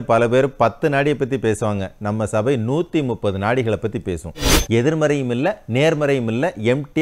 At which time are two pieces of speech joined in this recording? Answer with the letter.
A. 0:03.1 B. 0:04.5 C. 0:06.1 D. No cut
B